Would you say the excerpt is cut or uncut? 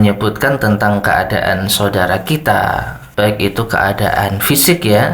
cut